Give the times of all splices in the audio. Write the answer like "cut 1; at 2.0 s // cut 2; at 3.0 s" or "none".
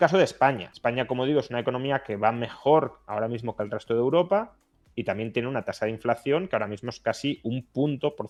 none